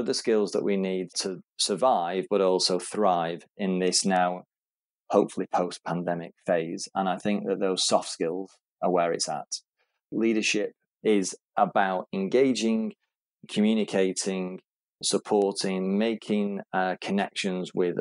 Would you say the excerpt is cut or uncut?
cut